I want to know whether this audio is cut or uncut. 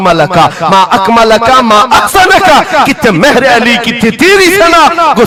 uncut